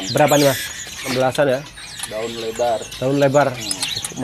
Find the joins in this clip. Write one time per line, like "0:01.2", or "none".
0:01.1